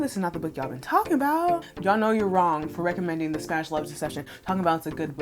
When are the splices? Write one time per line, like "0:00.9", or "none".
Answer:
0:01.7